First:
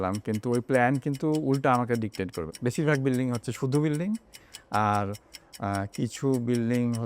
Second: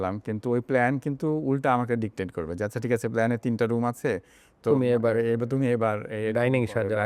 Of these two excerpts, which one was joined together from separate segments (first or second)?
first